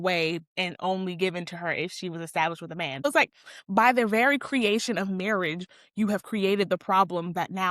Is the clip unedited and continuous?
no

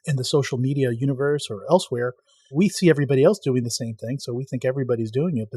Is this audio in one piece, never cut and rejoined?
no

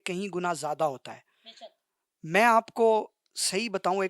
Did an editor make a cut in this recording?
no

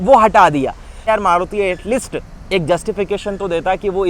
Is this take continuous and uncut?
no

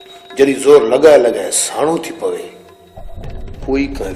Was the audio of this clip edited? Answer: no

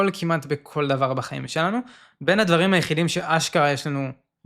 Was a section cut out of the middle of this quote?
no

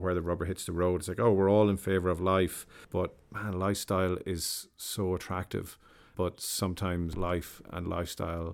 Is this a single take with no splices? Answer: no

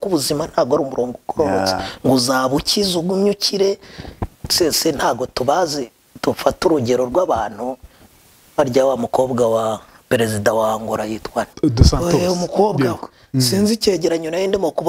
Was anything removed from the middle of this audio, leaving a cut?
no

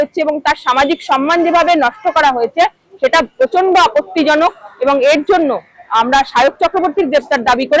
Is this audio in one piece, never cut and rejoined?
yes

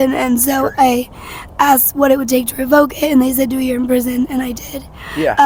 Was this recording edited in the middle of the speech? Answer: no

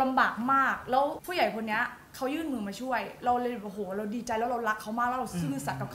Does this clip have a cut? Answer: yes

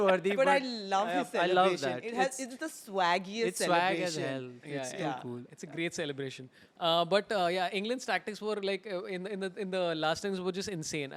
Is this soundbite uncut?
yes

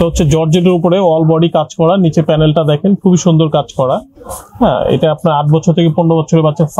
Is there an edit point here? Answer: no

